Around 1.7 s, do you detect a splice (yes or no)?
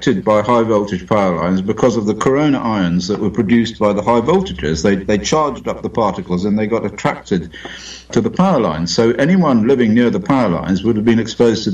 no